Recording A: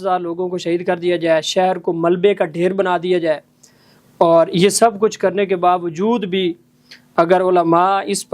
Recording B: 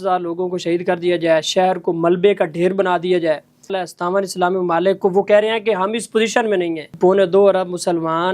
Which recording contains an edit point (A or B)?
B